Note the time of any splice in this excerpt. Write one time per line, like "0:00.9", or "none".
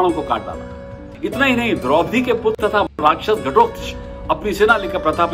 0:01.1